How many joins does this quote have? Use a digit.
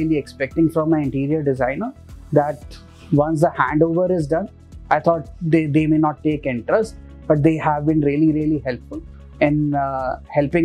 0